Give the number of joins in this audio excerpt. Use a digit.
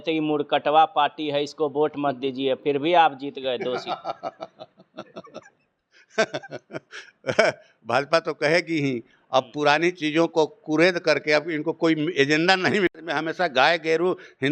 0